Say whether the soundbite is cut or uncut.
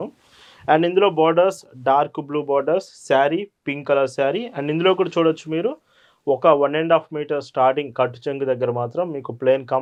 uncut